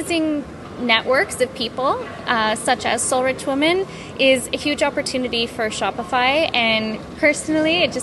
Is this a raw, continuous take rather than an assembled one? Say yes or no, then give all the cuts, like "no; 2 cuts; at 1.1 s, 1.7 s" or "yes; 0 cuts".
yes; 0 cuts